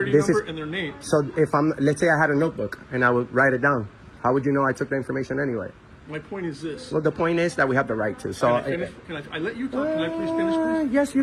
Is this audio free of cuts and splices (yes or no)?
yes